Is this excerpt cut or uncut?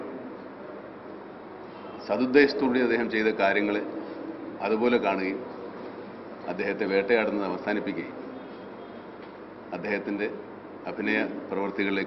cut